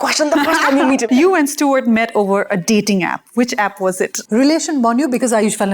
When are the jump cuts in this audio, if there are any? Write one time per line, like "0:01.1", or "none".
0:01.1
0:04.1